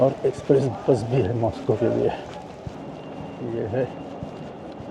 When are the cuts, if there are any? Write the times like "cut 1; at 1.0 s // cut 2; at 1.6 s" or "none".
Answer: cut 1; at 2.8 s